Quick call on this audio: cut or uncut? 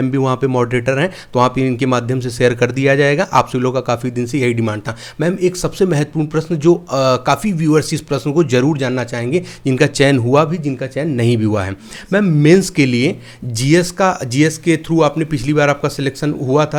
uncut